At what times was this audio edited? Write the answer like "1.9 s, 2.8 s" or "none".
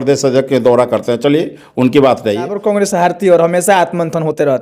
2.6 s